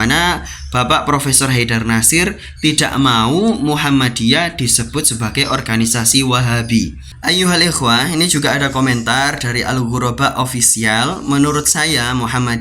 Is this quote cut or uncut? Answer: cut